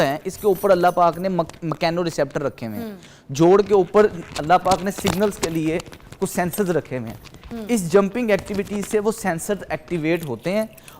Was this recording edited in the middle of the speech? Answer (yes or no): no